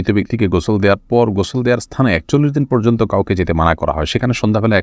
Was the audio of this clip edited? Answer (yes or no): no